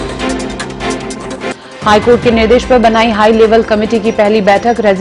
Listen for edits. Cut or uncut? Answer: cut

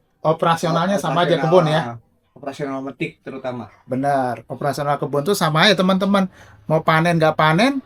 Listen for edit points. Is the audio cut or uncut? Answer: uncut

